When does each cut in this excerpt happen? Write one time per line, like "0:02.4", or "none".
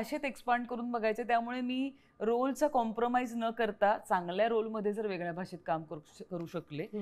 none